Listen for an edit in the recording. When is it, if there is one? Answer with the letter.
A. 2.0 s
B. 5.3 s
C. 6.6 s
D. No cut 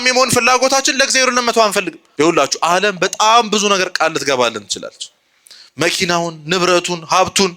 A